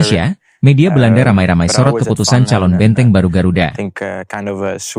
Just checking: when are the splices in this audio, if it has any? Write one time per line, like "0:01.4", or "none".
0:03.8